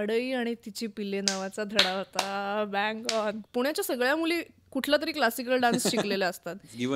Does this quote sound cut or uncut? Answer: cut